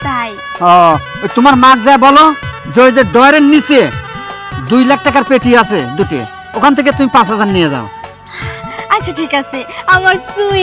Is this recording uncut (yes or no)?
yes